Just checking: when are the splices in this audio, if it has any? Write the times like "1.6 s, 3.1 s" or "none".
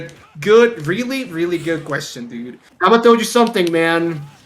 2.7 s

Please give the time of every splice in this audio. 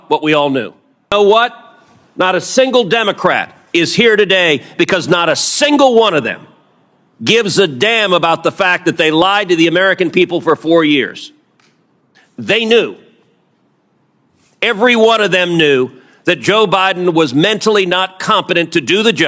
1.1 s

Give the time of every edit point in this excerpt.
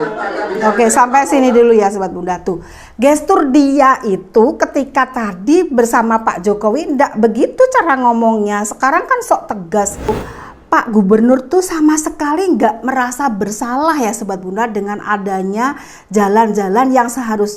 10.2 s

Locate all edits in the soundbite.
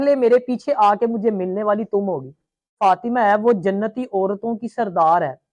2.8 s

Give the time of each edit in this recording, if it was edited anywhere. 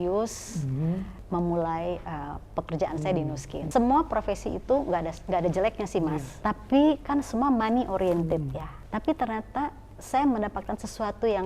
1.2 s, 3.7 s, 6.3 s, 8.8 s

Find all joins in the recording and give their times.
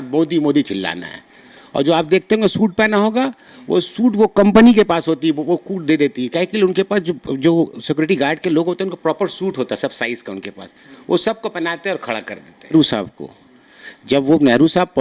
12.7 s

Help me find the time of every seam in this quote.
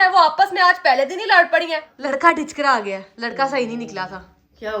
1.9 s

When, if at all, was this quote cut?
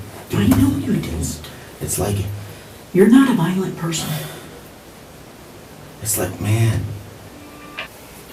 none

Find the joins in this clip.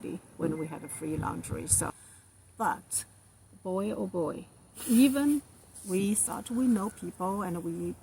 1.9 s

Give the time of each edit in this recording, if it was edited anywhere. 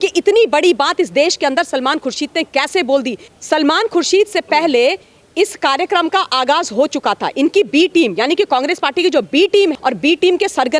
3.2 s, 9.8 s

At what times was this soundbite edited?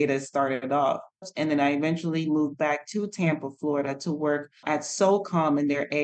1.3 s, 4.6 s

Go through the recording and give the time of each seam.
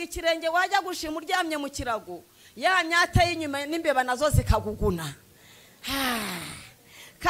none

